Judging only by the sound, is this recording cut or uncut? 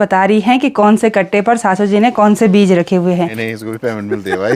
cut